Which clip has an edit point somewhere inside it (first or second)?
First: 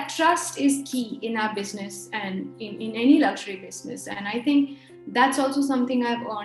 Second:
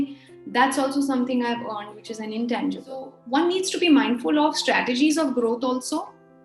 second